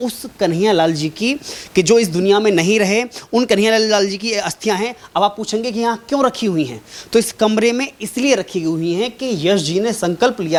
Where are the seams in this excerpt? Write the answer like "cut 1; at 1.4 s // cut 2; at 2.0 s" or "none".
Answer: none